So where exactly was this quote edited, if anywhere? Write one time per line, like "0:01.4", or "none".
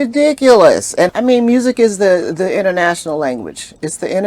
0:01.1